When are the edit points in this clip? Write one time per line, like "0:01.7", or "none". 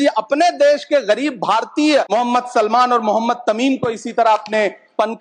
0:02.1